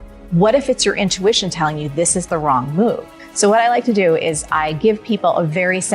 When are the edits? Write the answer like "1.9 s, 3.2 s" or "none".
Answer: 3.2 s